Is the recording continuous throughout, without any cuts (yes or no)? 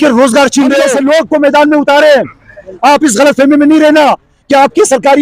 no